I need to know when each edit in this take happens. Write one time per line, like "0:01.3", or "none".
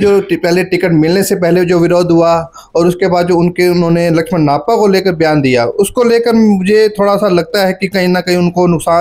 none